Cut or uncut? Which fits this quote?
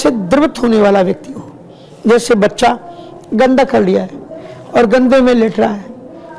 uncut